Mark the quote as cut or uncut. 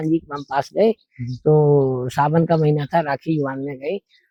uncut